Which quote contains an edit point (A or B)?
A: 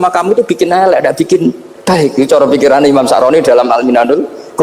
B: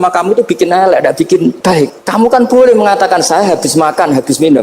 B